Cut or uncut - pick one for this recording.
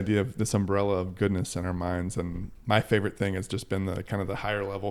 cut